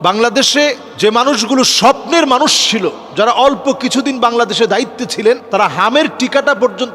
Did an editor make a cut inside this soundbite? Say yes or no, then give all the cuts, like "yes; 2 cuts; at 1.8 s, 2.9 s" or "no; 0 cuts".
no; 0 cuts